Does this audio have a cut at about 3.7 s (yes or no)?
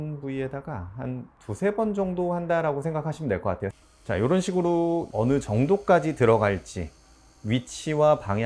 yes